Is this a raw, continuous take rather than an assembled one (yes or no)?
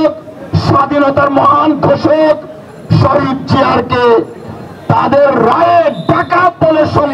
yes